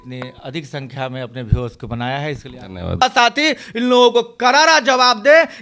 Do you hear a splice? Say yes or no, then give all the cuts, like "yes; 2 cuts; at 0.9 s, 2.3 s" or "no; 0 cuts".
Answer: yes; 1 cut; at 3.0 s